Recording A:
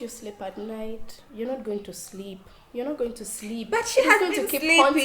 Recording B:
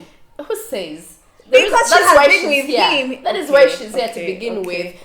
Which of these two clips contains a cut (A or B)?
A